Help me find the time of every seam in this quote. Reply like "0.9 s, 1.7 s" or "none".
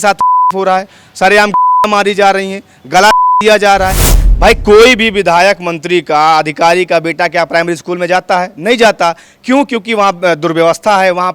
4.1 s